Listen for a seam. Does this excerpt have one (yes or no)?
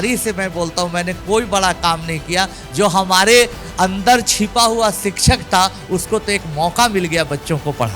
no